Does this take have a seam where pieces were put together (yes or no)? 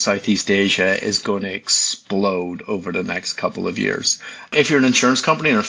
yes